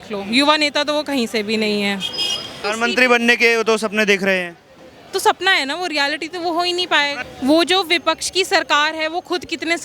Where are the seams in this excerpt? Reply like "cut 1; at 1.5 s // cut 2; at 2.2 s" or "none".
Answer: cut 1; at 2.6 s // cut 2; at 7.2 s